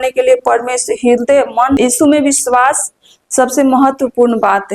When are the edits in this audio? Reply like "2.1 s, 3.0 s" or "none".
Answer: 1.8 s